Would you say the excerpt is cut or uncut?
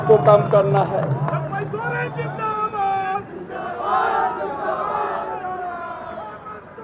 uncut